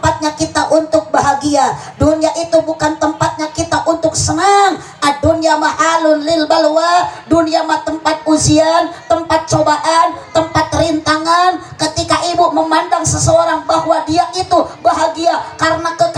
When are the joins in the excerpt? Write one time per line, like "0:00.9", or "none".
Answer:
none